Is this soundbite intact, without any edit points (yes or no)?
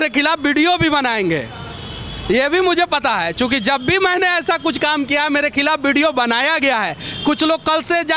yes